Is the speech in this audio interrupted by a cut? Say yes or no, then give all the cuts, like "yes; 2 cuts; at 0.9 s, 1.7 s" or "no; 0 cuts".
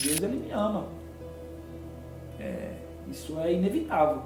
no; 0 cuts